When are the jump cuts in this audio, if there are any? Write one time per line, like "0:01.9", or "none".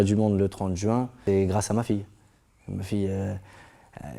0:01.2